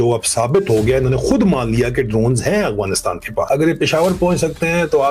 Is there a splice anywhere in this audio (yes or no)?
yes